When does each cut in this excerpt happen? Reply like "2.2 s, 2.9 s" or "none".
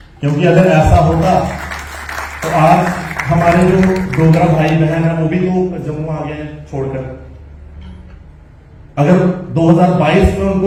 none